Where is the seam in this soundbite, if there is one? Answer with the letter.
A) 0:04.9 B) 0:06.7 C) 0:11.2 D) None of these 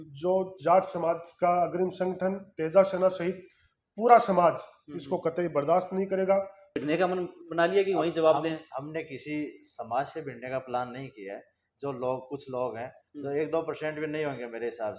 B